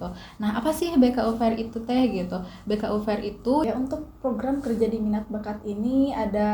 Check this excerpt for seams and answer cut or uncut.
cut